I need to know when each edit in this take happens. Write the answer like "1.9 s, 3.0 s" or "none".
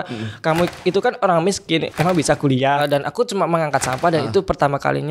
1.9 s, 2.8 s